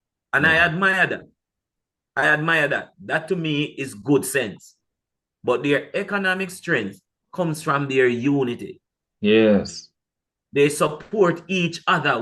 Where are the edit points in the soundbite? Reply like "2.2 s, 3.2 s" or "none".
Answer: none